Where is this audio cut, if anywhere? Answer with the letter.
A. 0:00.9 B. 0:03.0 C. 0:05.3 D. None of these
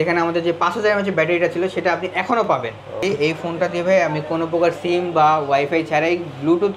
B